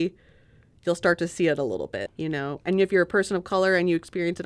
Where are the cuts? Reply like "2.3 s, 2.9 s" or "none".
2.0 s